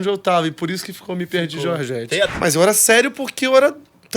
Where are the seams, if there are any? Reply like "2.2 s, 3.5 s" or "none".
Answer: 2.3 s